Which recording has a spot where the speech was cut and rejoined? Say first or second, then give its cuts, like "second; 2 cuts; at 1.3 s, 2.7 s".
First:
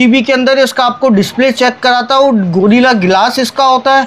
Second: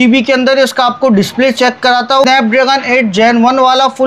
second; 1 cut; at 2.2 s